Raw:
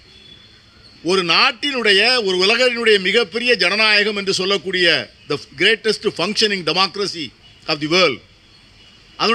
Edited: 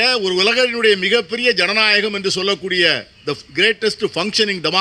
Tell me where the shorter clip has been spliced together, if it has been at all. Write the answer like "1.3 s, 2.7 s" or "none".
none